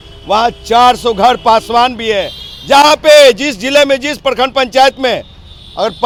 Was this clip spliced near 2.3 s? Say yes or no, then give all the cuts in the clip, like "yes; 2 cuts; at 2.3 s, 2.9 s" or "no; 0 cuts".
no; 0 cuts